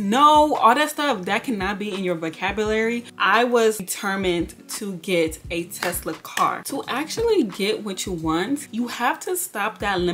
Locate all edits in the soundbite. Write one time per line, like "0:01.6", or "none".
0:03.1
0:03.8
0:06.7
0:08.7